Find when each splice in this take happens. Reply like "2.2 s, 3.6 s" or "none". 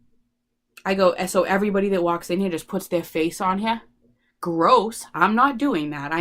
none